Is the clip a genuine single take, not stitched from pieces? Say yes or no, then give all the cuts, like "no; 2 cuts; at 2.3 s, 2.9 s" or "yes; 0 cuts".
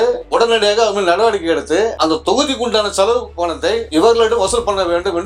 yes; 0 cuts